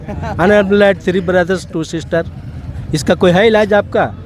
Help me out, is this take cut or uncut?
uncut